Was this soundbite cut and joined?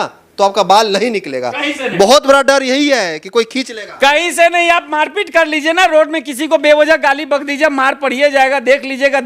no; 0 cuts

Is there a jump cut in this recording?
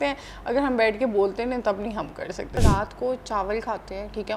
yes; 1 cut; at 2.6 s

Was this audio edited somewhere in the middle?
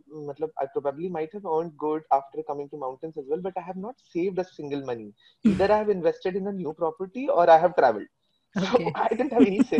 no; 0 cuts

